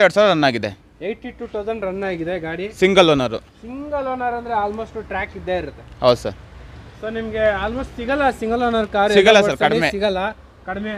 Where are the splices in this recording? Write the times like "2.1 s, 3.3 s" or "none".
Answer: none